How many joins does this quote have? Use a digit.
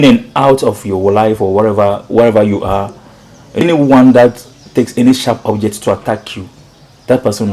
1